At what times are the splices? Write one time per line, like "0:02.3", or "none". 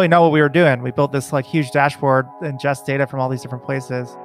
none